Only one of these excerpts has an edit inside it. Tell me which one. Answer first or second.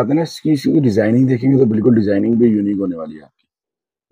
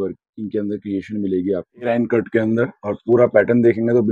second